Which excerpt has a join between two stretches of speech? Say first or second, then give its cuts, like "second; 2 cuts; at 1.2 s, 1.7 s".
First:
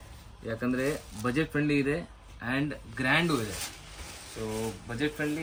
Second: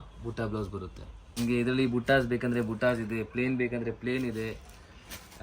second; 1 cut; at 1.4 s